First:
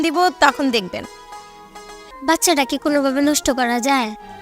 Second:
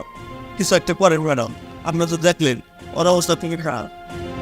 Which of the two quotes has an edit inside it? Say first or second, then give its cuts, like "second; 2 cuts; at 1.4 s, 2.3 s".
first; 1 cut; at 2.0 s